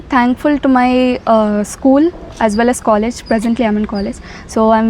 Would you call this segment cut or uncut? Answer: uncut